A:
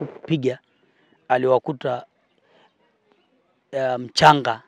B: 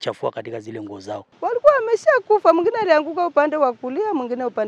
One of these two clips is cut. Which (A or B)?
B